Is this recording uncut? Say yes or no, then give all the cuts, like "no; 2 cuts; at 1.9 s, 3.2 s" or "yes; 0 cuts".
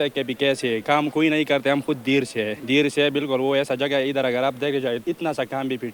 no; 3 cuts; at 0.8 s, 2.6 s, 5.0 s